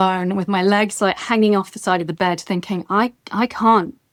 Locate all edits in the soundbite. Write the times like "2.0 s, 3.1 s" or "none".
none